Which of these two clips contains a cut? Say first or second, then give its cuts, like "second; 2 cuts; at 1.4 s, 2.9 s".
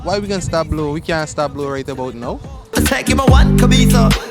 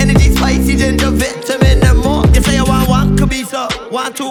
first; 1 cut; at 2.7 s